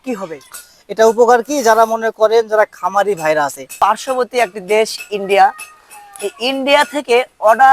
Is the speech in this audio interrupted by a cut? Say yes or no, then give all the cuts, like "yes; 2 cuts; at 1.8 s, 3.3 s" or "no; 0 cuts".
yes; 1 cut; at 3.7 s